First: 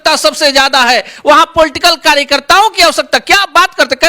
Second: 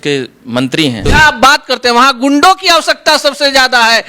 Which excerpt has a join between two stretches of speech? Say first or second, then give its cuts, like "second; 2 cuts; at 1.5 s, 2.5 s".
second; 1 cut; at 1.1 s